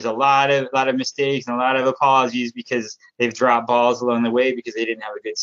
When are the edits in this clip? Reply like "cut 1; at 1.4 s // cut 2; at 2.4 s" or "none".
none